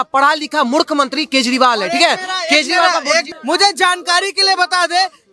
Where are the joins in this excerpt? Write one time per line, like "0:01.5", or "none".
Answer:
0:03.3